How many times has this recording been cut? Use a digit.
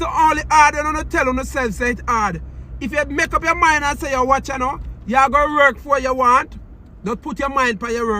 0